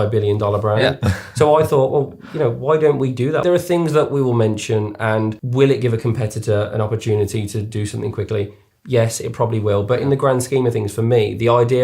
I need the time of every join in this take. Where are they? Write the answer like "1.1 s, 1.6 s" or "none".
3.4 s, 5.4 s